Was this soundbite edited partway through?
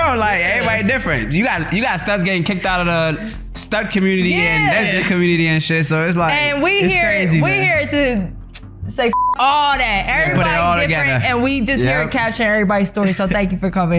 no; 0 cuts

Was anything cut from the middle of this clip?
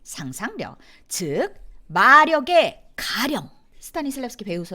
yes; 1 cut; at 3.8 s

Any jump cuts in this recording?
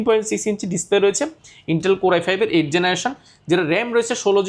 no; 0 cuts

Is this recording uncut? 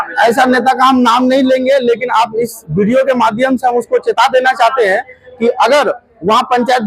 yes; 0 cuts

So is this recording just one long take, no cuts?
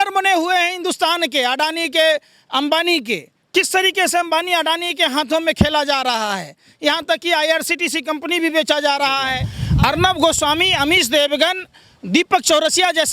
no; 1 cut; at 9.6 s

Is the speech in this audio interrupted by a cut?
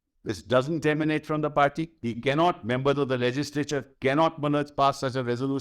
no; 0 cuts

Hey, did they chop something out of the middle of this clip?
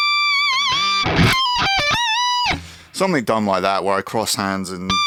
no; 0 cuts

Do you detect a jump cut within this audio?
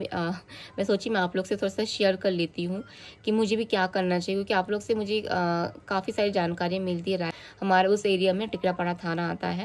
yes; 1 cut; at 7.3 s

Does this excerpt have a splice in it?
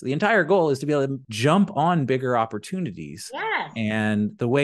yes; 1 cut; at 1.2 s

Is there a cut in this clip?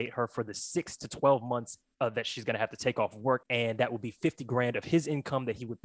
yes; 1 cut; at 3.4 s

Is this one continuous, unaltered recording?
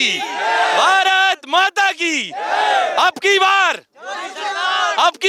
yes; 0 cuts

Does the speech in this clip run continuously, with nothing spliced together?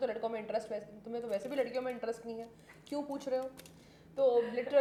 yes; 0 cuts

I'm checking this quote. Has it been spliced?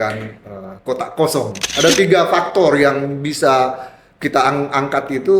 yes; 1 cut; at 1.5 s

